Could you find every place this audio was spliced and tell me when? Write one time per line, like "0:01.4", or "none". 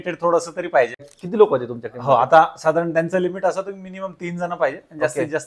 0:01.1